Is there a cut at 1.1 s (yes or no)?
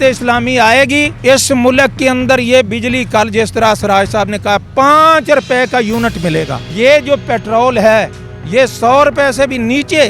yes